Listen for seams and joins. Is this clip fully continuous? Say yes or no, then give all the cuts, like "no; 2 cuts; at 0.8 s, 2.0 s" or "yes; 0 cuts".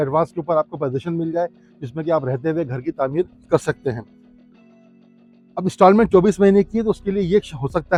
yes; 0 cuts